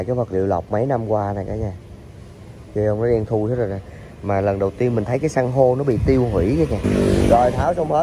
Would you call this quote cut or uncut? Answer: cut